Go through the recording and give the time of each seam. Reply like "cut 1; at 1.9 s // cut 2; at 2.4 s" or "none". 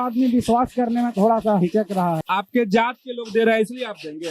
cut 1; at 2.2 s